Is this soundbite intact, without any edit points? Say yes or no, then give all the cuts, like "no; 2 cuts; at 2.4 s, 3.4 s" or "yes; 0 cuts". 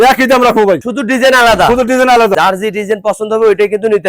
no; 2 cuts; at 0.9 s, 2.3 s